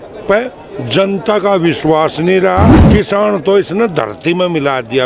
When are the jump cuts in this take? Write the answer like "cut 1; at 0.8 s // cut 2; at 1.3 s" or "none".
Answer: cut 1; at 2.8 s